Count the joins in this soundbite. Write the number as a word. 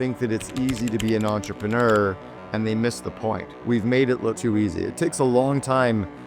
two